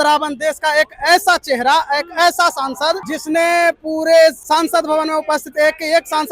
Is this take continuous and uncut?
no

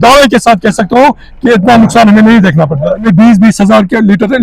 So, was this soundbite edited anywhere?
yes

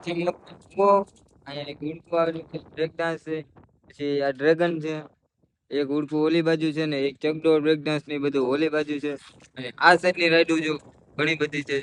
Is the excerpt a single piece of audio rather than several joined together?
yes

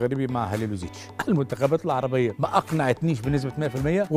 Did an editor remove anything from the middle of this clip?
yes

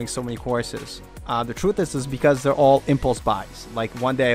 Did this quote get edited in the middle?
no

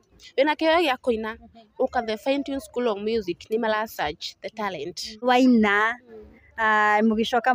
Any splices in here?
yes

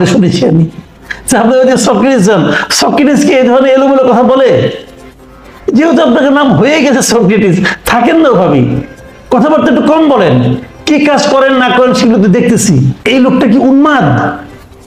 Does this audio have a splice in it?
yes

